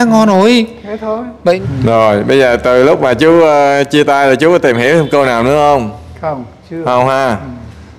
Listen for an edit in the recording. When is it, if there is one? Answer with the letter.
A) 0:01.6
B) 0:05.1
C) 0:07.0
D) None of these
A